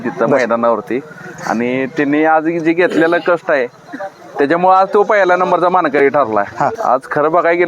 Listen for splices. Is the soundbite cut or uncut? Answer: cut